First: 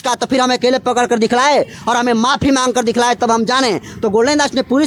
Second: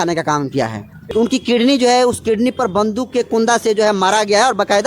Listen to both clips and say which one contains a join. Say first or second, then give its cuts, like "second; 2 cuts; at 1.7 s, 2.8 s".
second; 1 cut; at 0.9 s